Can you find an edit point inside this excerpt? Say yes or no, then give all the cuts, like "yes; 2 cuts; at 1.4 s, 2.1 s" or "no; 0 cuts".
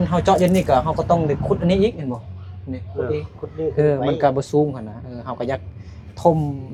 no; 0 cuts